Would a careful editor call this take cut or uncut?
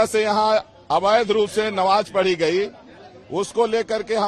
uncut